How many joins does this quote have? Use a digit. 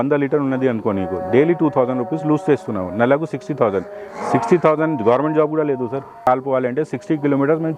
1